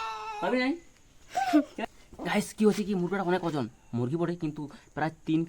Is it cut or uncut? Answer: cut